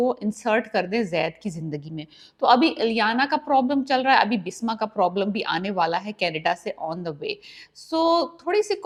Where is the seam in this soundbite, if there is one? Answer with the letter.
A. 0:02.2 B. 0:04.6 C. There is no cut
C